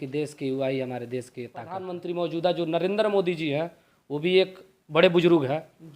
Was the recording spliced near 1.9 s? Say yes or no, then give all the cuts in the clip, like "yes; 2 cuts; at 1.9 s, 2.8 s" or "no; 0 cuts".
yes; 1 cut; at 1.9 s